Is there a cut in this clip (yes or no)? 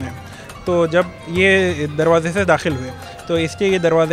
no